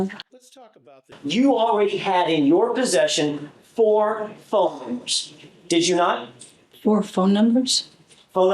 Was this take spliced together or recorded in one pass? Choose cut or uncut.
cut